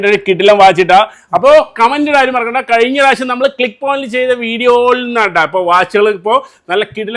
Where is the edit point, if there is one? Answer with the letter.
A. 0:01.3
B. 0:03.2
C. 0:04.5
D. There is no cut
D